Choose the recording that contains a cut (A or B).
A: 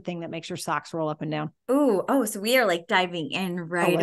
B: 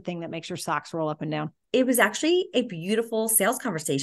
B